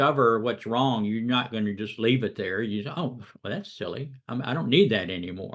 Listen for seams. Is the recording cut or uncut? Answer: uncut